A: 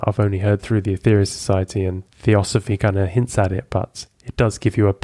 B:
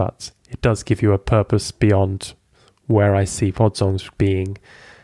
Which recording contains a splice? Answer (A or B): A